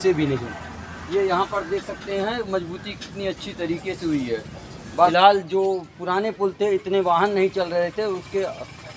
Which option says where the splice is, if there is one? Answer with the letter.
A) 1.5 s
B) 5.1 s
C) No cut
B